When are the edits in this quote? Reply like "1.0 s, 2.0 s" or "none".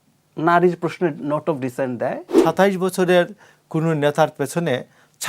2.4 s